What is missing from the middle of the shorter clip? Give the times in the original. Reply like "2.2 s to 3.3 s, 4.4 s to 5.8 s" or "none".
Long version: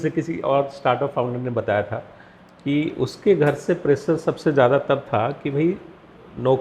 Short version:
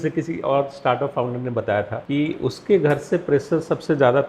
2.0 s to 2.5 s